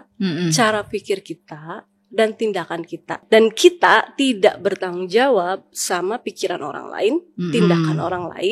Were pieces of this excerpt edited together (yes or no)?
yes